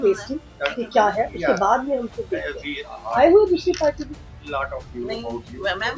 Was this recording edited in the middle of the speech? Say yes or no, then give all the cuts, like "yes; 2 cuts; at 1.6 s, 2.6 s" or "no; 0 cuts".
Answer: no; 0 cuts